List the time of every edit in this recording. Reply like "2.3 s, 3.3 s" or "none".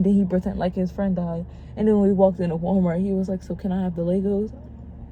none